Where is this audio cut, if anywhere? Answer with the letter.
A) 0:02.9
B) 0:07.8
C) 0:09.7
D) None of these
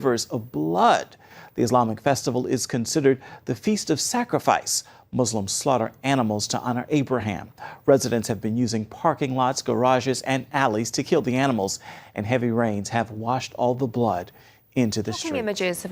A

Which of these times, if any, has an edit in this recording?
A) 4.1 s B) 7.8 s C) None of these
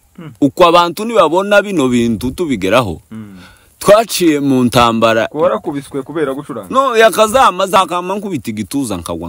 B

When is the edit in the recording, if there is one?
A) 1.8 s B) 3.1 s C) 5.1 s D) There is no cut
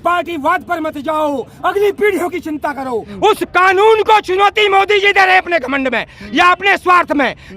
B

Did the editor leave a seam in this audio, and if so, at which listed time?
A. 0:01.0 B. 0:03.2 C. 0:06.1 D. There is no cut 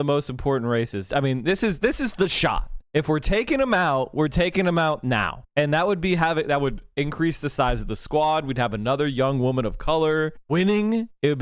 A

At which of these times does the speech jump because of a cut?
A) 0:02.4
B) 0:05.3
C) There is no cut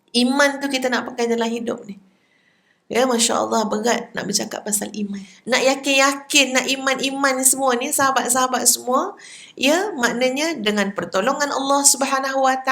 B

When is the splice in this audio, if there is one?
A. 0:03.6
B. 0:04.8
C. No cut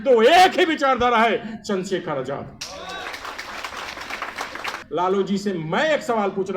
B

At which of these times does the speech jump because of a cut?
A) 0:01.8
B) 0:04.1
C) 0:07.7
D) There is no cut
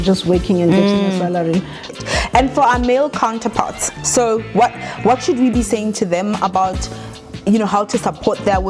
A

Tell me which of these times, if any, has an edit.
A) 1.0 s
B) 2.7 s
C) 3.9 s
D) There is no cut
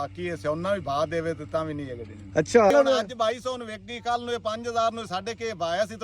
B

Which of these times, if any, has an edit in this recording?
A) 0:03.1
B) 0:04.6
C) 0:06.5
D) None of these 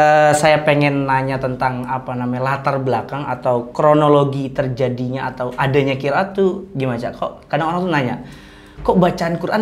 D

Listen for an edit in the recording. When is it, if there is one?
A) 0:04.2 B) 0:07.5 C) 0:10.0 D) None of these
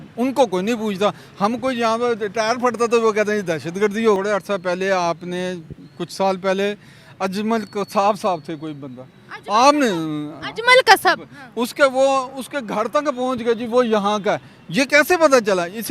A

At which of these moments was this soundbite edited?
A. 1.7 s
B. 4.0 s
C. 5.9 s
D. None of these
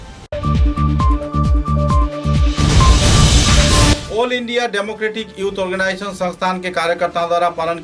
B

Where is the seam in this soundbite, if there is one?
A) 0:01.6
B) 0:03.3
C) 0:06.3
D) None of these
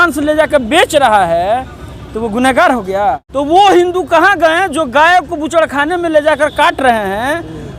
B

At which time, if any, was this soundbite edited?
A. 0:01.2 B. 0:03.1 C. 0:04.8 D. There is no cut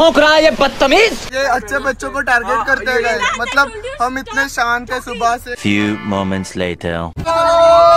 A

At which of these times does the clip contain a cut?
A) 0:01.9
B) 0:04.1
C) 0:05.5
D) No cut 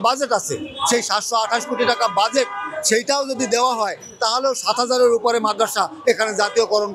D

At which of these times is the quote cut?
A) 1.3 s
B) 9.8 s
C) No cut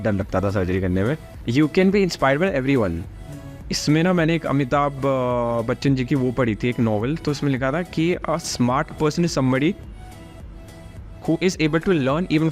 A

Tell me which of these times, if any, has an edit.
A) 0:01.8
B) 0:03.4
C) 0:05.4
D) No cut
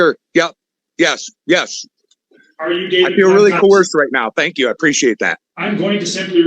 C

